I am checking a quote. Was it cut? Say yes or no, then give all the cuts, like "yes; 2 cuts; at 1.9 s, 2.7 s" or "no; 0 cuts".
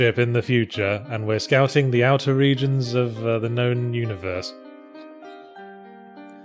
yes; 1 cut; at 4.0 s